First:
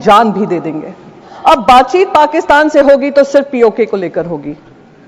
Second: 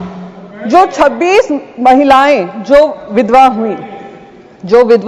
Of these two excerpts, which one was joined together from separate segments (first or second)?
first